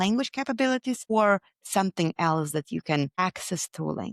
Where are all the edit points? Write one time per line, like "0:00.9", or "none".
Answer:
0:01.1
0:03.2